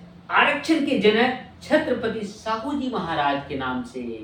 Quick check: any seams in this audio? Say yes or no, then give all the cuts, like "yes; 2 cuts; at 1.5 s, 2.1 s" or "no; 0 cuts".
no; 0 cuts